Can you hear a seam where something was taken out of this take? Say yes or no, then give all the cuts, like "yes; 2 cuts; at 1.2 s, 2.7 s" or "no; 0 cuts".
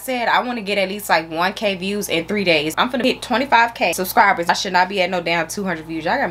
yes; 2 cuts; at 2.9 s, 4.2 s